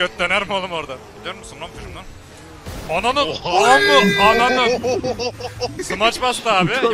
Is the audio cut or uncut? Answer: cut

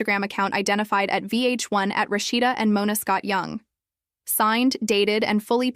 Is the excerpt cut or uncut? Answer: cut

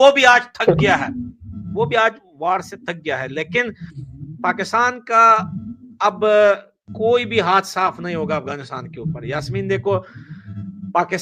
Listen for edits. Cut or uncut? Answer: uncut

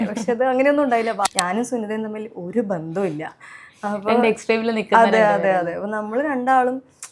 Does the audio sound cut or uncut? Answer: cut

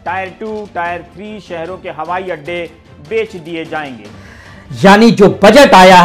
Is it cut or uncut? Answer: cut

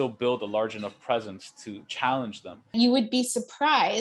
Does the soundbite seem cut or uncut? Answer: cut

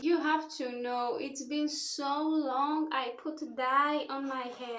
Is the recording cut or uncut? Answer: uncut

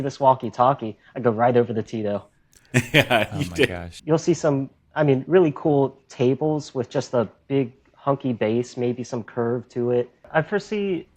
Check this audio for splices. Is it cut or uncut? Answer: cut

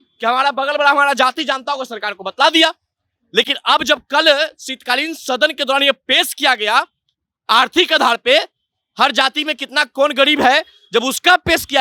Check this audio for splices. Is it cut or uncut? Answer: uncut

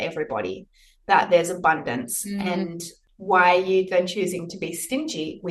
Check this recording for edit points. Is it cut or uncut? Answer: cut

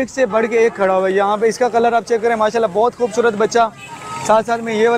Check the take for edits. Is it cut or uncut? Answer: uncut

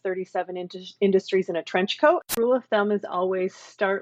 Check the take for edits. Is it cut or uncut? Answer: cut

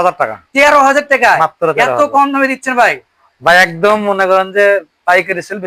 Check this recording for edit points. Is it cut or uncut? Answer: uncut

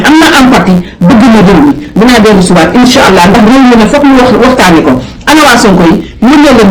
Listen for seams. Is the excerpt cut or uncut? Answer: uncut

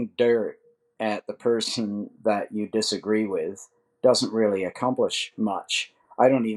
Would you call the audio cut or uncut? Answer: uncut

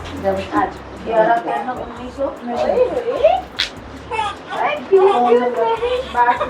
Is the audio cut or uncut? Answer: uncut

